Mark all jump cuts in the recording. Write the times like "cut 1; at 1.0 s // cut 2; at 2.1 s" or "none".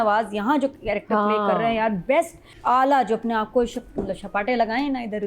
cut 1; at 2.4 s